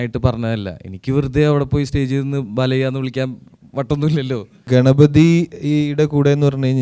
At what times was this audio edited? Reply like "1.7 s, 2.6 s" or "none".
4.6 s